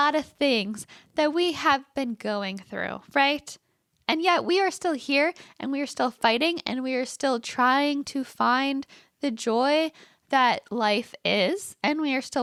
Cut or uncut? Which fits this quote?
uncut